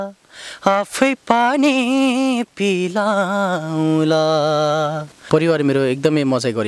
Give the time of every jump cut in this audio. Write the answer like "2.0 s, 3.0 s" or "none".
5.2 s

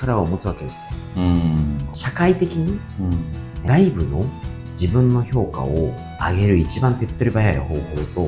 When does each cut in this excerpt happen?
1.8 s

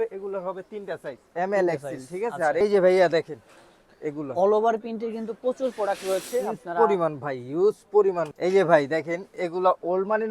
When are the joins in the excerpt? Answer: 2.6 s, 8.3 s

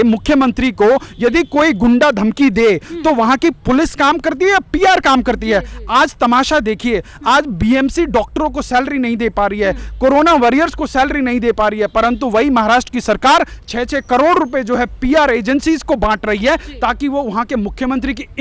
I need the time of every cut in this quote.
none

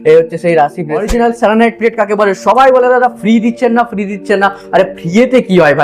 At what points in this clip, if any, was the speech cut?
1.1 s

